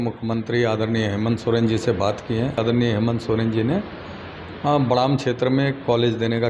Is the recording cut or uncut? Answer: cut